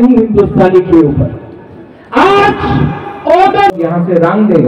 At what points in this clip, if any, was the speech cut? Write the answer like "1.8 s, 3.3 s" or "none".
3.8 s